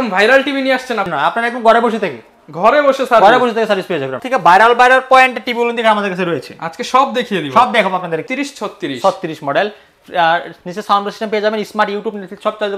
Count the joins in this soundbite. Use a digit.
3